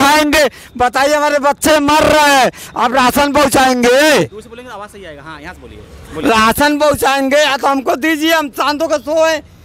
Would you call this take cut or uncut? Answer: uncut